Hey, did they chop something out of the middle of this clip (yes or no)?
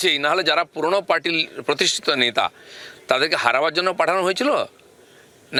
no